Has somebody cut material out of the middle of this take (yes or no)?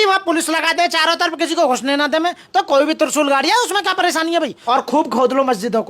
yes